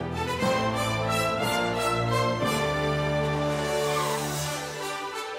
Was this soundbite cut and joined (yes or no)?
no